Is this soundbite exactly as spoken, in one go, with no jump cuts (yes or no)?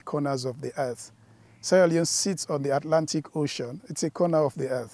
yes